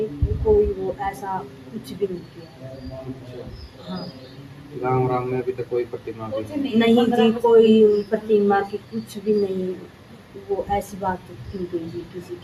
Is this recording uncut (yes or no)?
yes